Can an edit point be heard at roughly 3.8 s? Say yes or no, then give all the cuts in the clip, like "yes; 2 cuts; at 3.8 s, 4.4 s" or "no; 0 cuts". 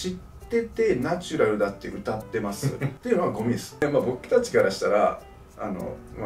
yes; 2 cuts; at 2.9 s, 3.8 s